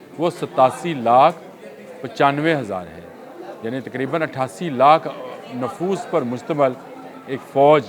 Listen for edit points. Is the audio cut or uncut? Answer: uncut